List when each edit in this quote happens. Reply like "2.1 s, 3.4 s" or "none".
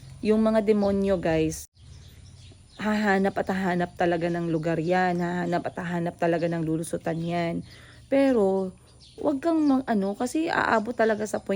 1.8 s